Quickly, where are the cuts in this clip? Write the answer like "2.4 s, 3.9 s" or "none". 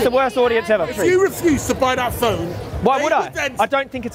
0.9 s